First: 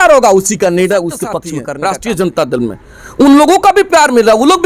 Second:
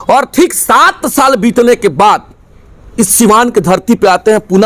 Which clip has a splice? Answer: first; 1 cut; at 1.5 s

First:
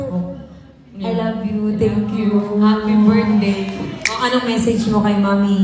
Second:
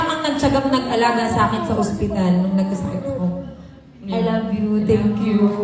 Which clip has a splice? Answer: first; 1 cut; at 4.0 s

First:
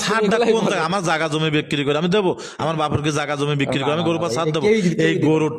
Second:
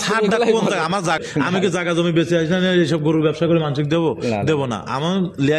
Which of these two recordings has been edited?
second; 1 cut; at 1.2 s

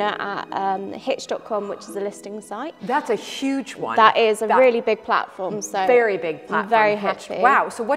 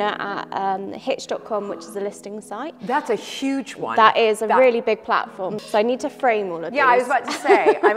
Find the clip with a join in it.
second; 1 cut; at 5.6 s

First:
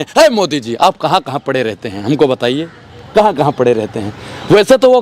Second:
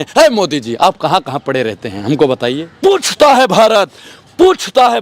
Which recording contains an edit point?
second; 1 cut; at 2.7 s

